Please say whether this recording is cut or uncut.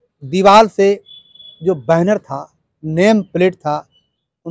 uncut